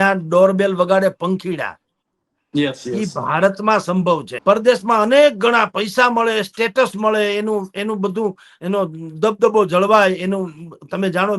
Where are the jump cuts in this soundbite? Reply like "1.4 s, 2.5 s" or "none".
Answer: 4.3 s